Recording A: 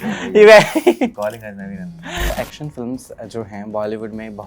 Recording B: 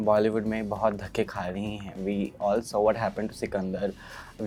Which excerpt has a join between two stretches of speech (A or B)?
A